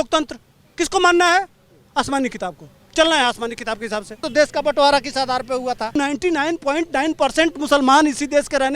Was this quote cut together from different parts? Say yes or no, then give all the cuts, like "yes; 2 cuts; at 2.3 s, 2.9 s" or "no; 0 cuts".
yes; 2 cuts; at 4.2 s, 5.9 s